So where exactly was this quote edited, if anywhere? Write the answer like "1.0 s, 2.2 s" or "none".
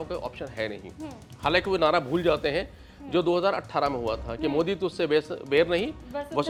none